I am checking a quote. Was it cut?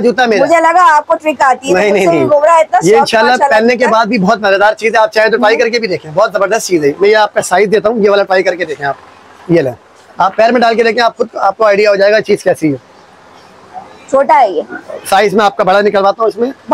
no; 0 cuts

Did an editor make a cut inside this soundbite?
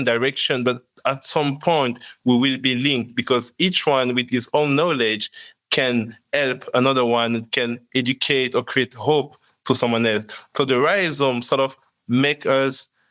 no; 0 cuts

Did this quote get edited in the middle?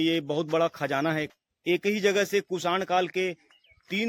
yes; 1 cut; at 1.3 s

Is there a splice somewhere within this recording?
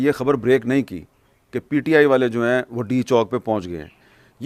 no; 0 cuts

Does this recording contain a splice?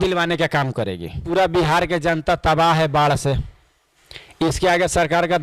yes; 1 cut; at 1.2 s

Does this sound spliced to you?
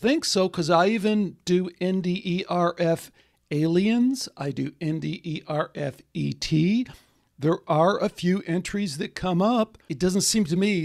yes; 1 cut; at 9.8 s

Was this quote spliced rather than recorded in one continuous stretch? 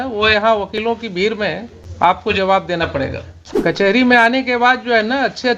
yes; 2 cuts; at 1.8 s, 3.8 s

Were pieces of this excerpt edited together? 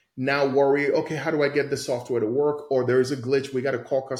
no; 0 cuts

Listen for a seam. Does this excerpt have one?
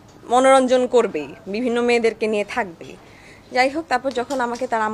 no; 0 cuts

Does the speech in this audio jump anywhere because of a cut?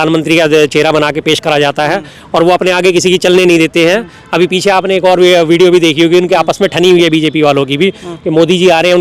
no; 0 cuts

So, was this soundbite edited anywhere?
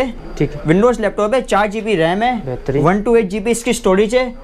no; 0 cuts

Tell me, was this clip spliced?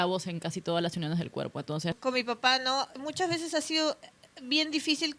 yes; 2 cuts; at 2.0 s, 2.9 s

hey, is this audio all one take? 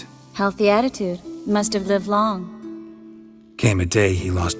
yes; 0 cuts

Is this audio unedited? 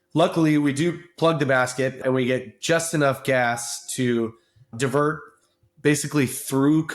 no; 2 cuts; at 2.0 s, 4.7 s

